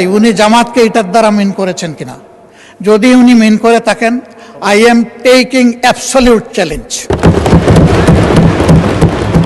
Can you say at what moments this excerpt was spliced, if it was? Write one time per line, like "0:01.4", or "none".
none

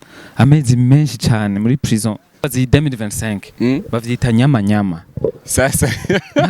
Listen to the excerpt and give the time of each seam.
0:02.5

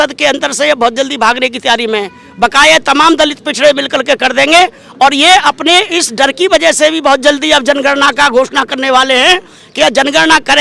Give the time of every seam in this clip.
none

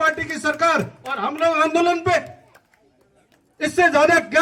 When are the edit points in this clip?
none

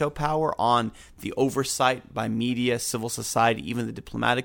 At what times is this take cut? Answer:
none

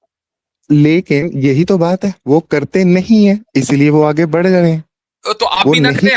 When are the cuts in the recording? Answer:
none

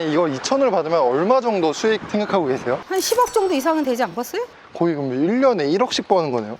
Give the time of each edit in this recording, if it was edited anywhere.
0:02.8
0:04.5

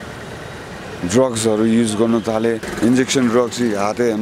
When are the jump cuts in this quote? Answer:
0:02.7

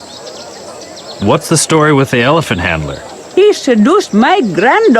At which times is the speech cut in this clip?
0:01.1

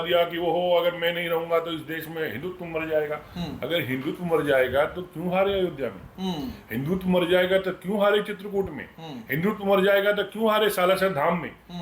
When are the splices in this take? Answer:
none

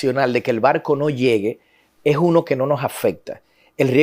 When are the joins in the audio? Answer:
none

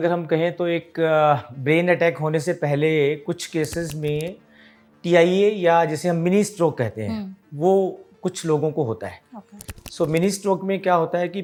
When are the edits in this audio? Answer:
none

